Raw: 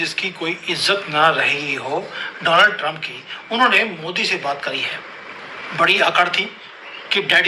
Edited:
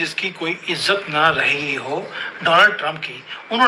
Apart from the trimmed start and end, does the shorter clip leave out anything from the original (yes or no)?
no